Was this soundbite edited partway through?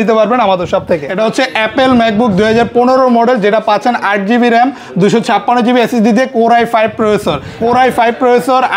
yes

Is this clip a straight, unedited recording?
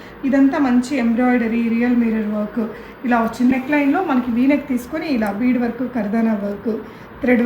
no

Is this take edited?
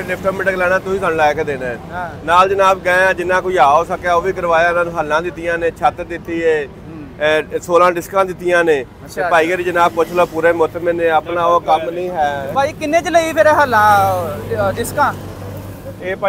no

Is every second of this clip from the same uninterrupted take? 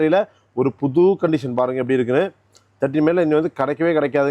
yes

